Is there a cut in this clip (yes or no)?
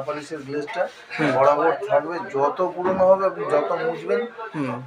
no